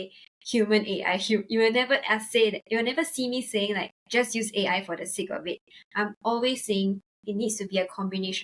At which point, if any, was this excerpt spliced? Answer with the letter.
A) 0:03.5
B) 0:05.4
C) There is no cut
C